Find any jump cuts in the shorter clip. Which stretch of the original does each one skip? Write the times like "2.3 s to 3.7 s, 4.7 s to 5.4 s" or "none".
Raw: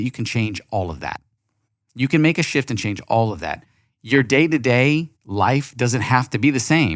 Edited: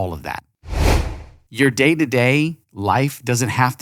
1.8 s to 3.6 s